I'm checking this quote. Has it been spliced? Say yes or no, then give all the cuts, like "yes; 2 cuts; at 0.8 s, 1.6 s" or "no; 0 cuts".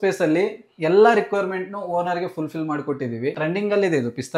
yes; 1 cut; at 3.4 s